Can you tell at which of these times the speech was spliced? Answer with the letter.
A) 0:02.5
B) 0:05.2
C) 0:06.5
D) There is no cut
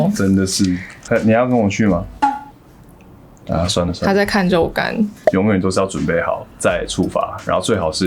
B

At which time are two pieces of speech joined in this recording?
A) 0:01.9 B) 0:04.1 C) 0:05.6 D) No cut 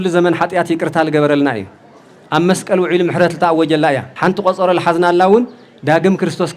B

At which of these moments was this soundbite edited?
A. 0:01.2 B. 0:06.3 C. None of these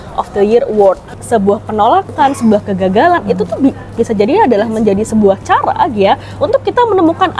A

